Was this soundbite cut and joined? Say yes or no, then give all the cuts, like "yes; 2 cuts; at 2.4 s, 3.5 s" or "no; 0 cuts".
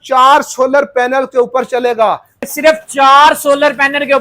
yes; 1 cut; at 2.3 s